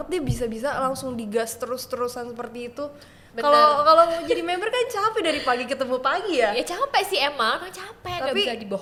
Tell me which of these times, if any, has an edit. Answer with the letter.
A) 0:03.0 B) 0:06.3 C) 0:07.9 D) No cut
D